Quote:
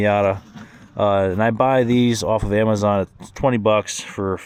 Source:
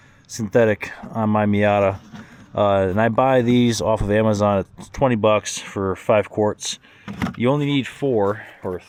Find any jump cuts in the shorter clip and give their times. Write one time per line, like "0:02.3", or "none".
none

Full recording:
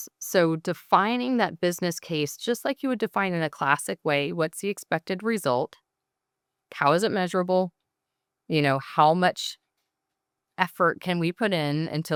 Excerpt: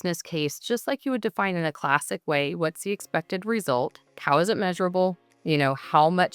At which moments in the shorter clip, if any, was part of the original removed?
0:04.1
0:05.3

